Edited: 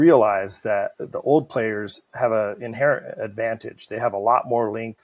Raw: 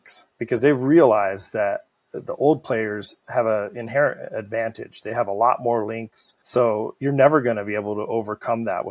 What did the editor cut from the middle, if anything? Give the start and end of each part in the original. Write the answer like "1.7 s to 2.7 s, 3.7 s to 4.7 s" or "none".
1.9 s to 2.2 s